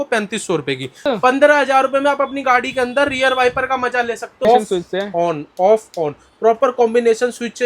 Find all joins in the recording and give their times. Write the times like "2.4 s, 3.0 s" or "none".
1.0 s, 4.4 s